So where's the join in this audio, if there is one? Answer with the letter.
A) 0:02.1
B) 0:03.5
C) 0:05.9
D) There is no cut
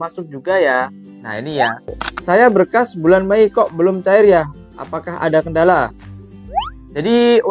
A